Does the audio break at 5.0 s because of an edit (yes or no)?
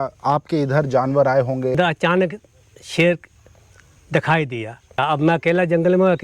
yes